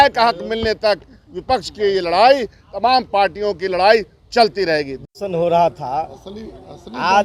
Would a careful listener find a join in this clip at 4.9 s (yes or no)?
no